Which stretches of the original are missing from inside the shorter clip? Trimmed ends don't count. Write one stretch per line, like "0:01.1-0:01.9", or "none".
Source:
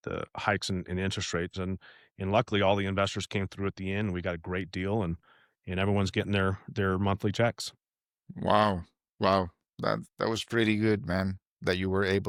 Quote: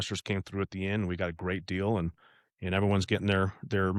none